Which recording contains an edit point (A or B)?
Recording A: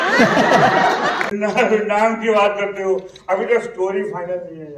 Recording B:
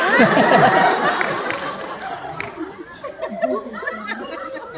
A